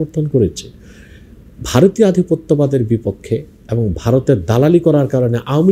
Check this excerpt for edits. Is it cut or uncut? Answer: uncut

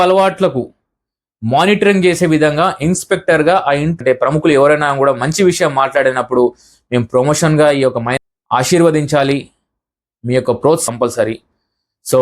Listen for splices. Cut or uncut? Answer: cut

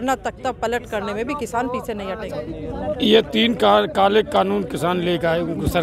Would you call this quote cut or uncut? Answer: uncut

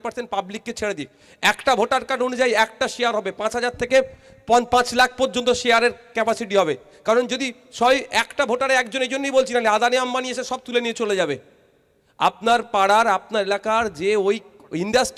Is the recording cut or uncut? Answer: uncut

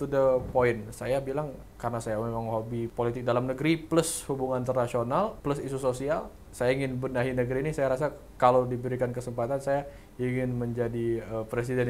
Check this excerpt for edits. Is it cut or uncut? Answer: cut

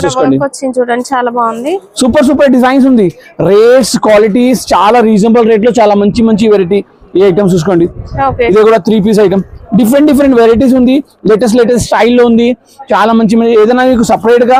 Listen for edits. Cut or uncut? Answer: uncut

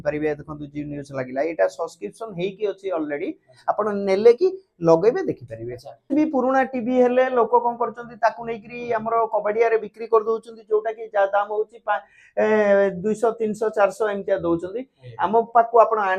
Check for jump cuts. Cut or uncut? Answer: cut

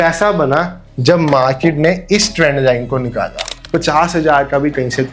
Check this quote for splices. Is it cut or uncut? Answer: cut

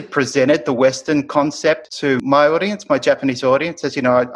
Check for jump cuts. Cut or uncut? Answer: cut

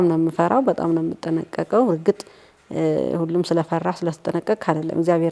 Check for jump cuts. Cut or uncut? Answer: uncut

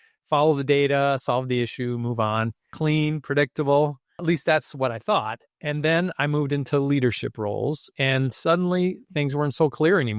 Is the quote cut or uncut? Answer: cut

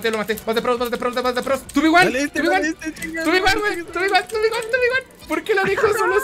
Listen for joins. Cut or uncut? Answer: cut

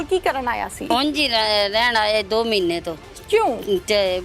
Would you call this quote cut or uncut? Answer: cut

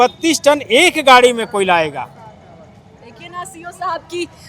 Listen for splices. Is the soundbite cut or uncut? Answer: uncut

